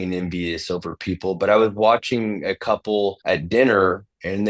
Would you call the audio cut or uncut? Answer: cut